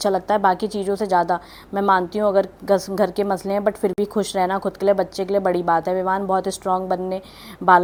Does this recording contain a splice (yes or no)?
no